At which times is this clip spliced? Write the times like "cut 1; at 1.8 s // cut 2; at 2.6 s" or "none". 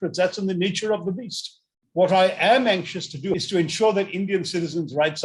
cut 1; at 3.3 s